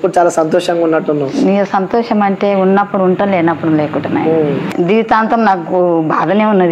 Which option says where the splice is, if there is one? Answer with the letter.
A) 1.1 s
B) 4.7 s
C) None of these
B